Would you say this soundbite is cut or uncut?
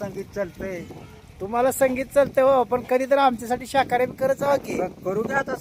uncut